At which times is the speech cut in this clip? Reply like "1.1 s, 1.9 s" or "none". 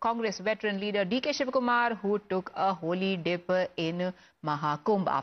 none